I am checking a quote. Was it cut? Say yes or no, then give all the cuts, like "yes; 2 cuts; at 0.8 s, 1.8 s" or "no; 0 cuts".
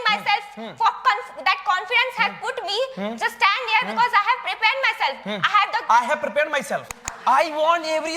yes; 1 cut; at 7.0 s